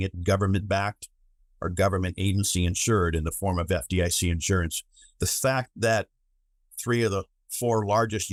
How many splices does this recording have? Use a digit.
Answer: 0